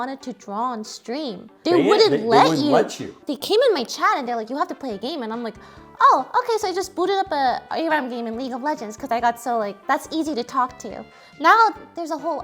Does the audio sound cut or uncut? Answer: cut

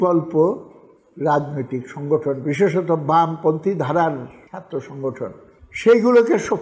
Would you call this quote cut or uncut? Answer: uncut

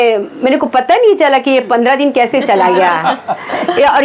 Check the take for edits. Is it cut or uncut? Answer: uncut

